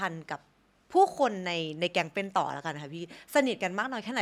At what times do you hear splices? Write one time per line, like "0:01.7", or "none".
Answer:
none